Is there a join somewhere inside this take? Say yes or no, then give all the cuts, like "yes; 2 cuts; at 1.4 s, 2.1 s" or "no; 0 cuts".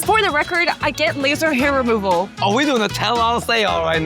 yes; 1 cut; at 2.3 s